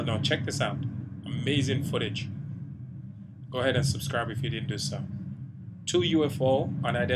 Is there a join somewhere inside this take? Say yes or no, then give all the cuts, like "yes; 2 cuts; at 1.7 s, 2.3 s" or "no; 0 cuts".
no; 0 cuts